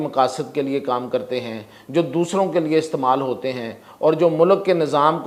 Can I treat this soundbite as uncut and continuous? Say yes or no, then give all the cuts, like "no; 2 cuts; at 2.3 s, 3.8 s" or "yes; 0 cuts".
yes; 0 cuts